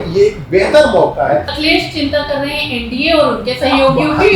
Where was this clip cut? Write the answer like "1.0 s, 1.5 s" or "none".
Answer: 1.6 s